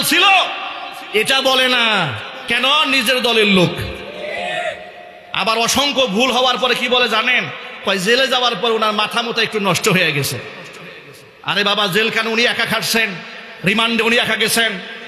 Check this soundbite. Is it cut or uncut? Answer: uncut